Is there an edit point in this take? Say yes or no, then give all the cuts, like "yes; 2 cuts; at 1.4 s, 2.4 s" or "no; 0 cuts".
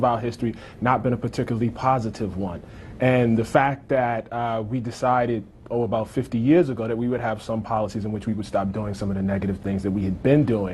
no; 0 cuts